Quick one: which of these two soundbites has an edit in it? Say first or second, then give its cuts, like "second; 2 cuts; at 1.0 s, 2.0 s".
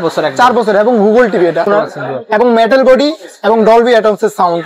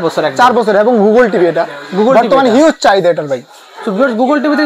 first; 1 cut; at 1.7 s